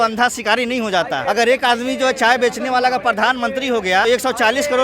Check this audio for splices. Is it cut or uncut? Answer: cut